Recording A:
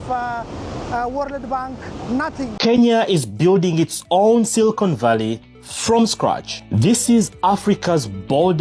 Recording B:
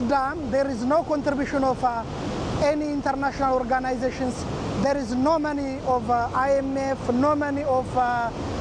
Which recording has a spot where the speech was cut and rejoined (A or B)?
A